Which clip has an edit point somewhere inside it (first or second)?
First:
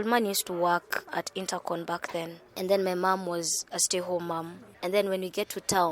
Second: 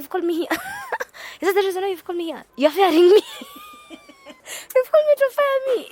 first